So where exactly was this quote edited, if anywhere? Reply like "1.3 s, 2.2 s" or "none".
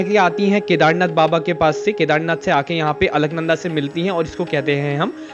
none